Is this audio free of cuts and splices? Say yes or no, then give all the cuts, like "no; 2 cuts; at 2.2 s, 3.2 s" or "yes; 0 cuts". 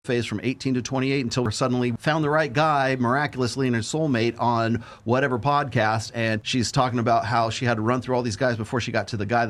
no; 1 cut; at 1.6 s